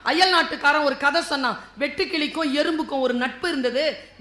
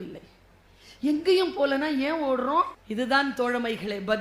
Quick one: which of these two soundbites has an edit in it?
second; 1 cut; at 2.8 s

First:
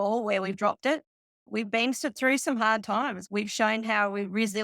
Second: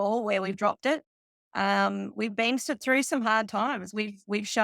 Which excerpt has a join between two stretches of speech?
first; 2 cuts; at 1.4 s, 3.2 s

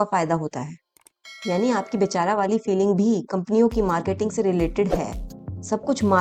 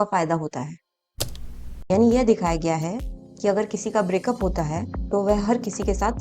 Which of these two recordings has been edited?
second; 1 cut; at 1.4 s

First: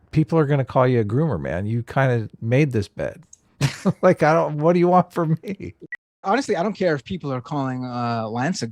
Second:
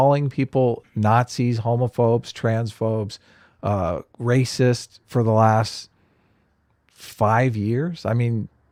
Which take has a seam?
first; 1 cut; at 6.2 s

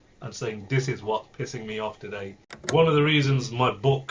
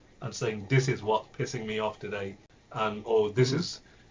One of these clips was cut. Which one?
first; 1 cut; at 2.5 s

